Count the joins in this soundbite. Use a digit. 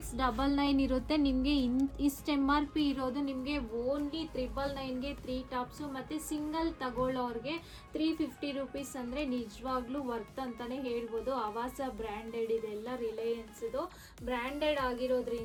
0